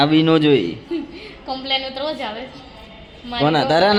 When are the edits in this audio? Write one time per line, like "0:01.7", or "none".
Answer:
none

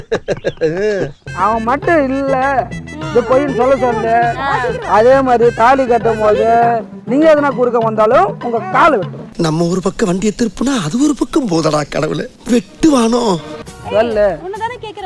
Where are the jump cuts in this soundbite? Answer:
0:01.1
0:13.5

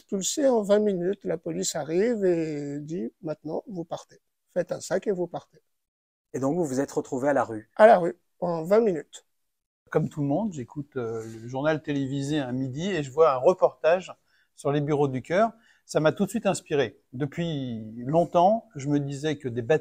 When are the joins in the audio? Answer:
0:09.9

